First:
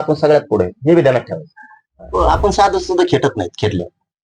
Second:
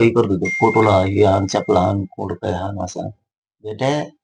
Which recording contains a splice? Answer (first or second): first